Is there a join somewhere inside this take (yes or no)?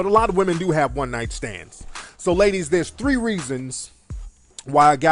yes